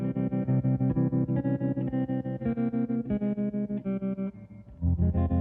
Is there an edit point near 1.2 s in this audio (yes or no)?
no